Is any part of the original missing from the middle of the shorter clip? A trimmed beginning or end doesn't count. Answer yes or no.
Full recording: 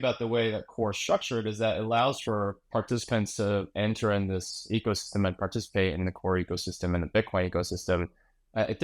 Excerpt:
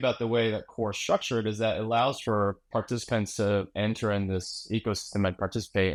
no